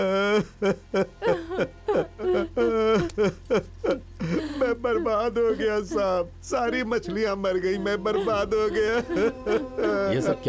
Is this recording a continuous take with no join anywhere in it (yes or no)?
no